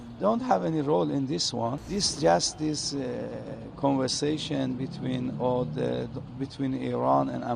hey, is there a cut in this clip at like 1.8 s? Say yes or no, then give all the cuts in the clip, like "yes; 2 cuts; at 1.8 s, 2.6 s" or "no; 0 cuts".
yes; 1 cut; at 1.8 s